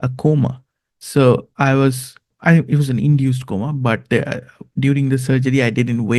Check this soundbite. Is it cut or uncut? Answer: cut